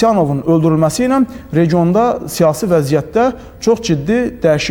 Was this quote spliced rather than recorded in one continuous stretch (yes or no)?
no